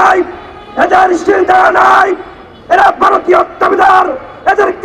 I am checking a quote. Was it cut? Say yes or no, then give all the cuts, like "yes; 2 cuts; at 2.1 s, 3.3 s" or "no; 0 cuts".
no; 0 cuts